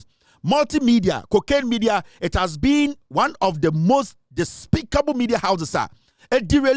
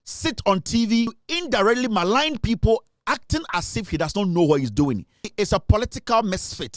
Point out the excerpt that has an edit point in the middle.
second; 2 cuts; at 1.3 s, 5.3 s

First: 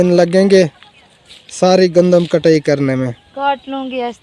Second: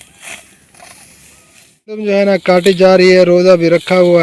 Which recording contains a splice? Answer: second; 1 cut; at 2.0 s

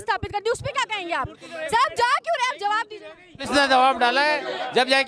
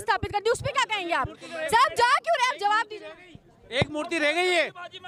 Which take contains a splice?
first; 1 cut; at 3.3 s

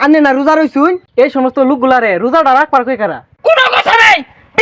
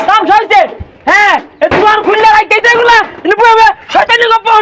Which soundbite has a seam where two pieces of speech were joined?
first; 2 cuts; at 1.0 s, 3.3 s

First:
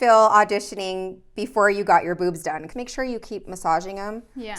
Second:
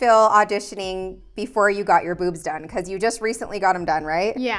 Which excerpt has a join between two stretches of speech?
first; 1 cut; at 2.6 s

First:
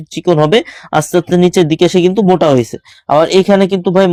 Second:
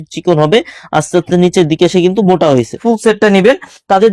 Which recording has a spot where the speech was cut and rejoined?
second; 1 cut; at 2.8 s

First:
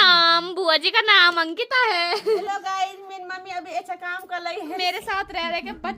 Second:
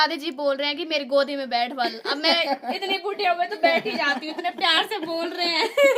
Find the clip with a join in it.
first; 2 cuts; at 2.4 s, 4.8 s

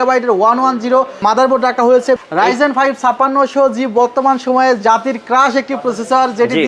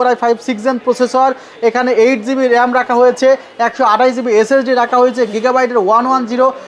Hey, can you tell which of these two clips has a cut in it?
first; 1 cut; at 2.2 s

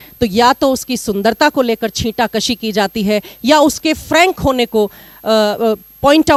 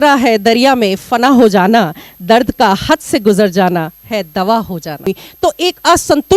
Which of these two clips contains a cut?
second; 1 cut; at 5.1 s

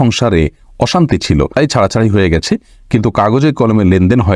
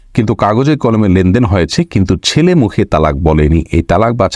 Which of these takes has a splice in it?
first; 1 cut; at 1.5 s

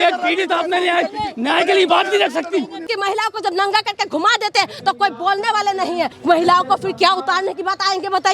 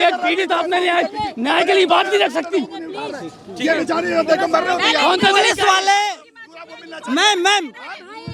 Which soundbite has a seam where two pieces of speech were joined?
first; 2 cuts; at 2.9 s, 6.1 s

